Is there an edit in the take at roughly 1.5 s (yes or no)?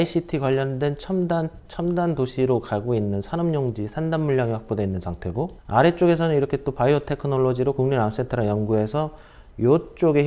no